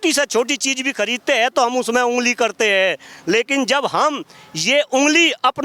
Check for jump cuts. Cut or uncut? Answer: uncut